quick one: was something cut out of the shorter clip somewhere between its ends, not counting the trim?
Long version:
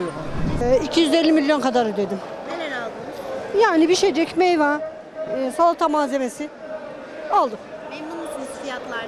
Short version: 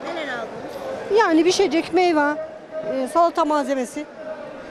no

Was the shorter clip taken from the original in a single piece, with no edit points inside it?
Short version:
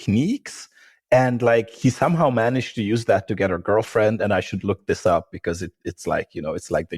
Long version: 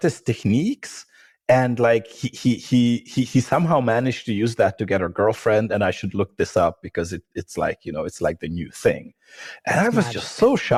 no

